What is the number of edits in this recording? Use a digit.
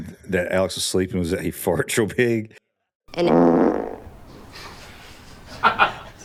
0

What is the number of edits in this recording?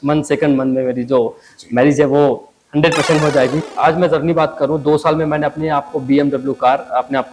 1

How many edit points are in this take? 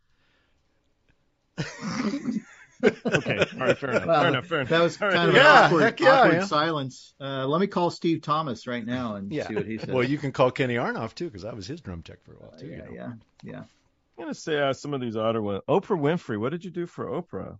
0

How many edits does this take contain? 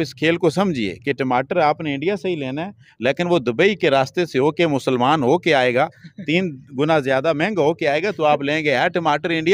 0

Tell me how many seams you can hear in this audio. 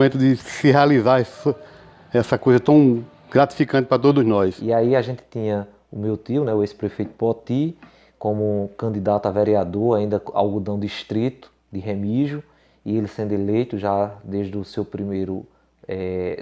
1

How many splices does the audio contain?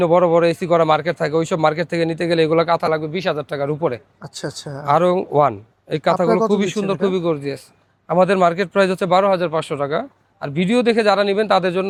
0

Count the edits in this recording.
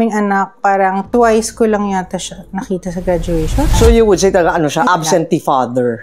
2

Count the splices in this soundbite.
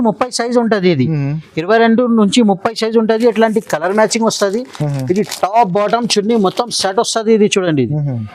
0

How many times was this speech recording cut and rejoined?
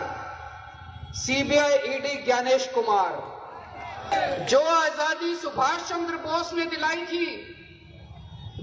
1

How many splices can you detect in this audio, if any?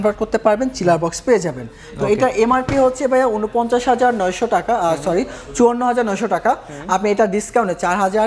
0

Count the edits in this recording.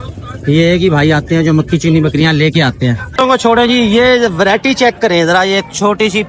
1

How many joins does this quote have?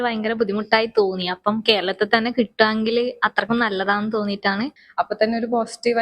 1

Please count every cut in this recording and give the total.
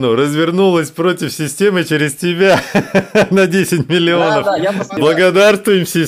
1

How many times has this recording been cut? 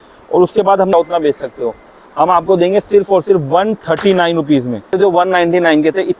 2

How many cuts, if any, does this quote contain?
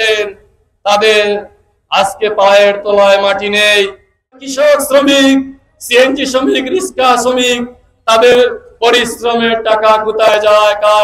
1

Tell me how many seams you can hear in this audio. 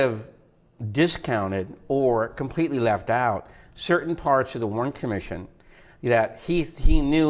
1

